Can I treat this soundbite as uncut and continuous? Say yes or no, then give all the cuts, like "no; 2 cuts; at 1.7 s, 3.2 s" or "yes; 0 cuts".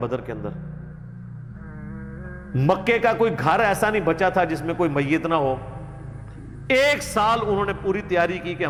yes; 0 cuts